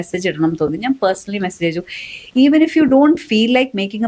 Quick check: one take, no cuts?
yes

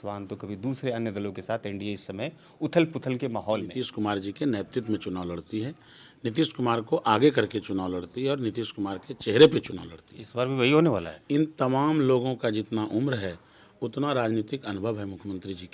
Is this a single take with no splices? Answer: no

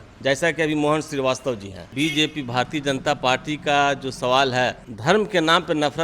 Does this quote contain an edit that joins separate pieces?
yes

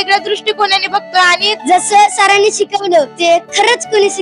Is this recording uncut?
no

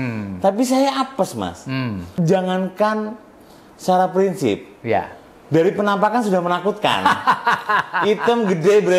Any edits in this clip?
yes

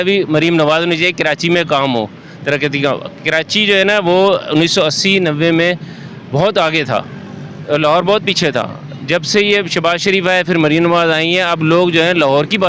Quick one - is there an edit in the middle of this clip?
no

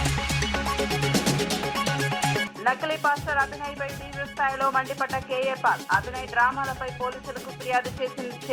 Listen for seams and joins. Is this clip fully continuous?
no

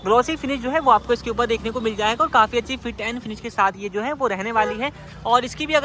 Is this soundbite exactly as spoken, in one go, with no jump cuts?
yes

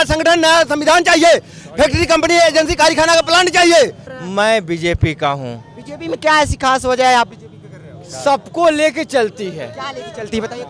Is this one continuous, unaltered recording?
no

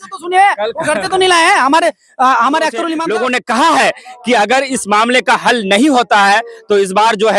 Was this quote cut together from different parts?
yes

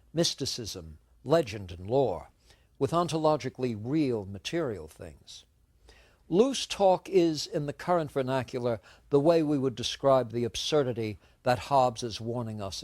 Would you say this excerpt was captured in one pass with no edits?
no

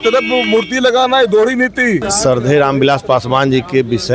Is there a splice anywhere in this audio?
yes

